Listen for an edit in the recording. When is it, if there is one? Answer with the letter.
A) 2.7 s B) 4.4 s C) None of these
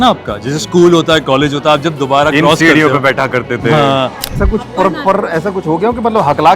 B